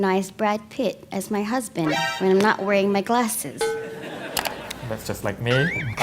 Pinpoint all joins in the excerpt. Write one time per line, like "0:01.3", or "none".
0:04.7